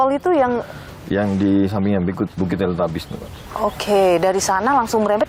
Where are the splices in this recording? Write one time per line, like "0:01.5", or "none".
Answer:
none